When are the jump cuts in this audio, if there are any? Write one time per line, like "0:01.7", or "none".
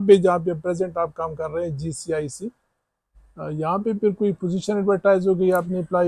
none

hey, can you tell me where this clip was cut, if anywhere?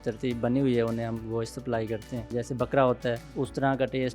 0:02.3
0:03.3

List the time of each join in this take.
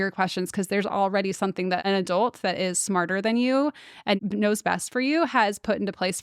0:01.8
0:04.2

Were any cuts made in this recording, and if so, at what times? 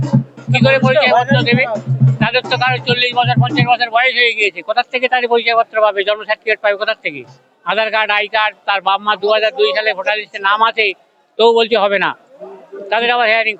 none

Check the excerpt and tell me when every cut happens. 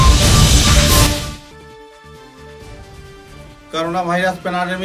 0:02.6

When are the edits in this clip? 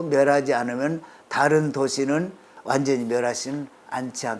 0:02.5

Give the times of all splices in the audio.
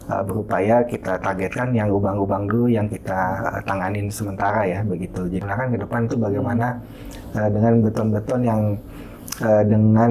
0:05.4

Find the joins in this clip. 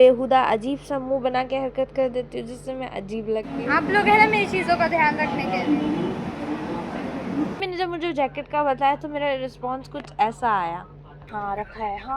0:03.6
0:07.6

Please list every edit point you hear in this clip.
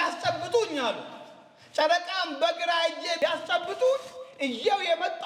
none

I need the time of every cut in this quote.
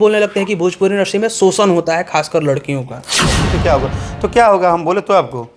0:03.4

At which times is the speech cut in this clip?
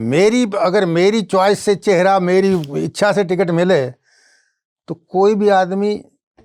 none

